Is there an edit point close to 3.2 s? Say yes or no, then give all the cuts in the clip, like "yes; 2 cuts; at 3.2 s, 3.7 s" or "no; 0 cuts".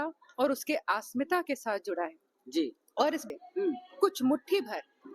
yes; 1 cut; at 3.2 s